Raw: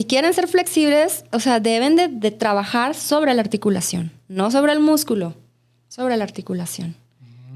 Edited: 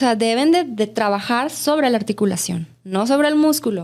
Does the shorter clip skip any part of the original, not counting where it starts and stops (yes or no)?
no